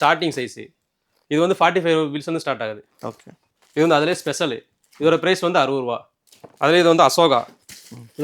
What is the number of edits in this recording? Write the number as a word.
zero